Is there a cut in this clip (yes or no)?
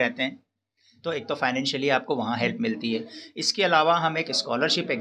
no